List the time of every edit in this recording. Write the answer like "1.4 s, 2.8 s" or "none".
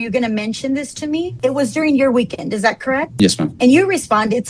3.5 s